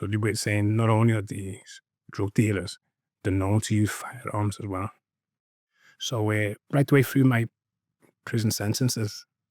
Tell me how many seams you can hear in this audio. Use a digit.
1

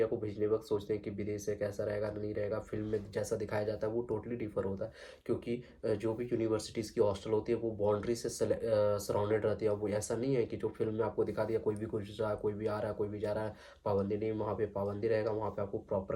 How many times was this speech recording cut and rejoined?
0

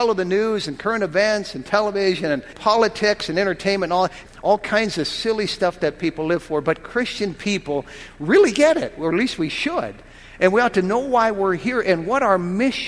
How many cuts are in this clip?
2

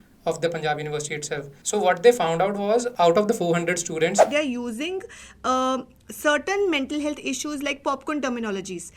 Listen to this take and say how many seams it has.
3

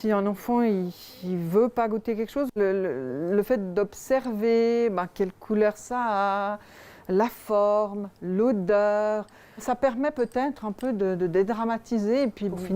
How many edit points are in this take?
0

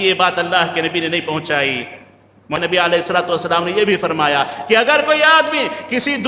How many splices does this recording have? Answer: 1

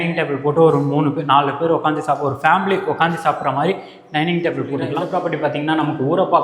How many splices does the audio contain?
1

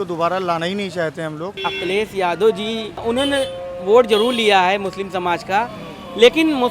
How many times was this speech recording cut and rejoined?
2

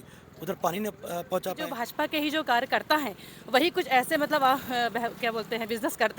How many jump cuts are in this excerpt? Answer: 1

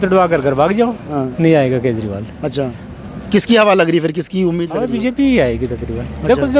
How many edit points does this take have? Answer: 1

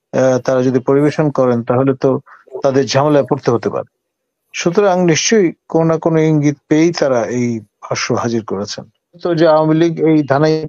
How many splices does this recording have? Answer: 1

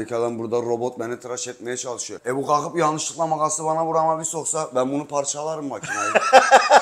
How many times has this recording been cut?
1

